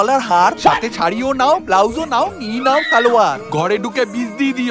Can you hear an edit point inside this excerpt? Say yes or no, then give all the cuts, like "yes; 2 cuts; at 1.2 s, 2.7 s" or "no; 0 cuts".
no; 0 cuts